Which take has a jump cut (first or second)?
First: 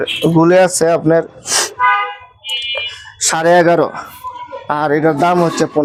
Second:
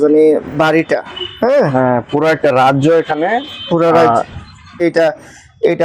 second